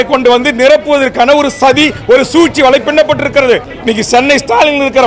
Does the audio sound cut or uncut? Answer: cut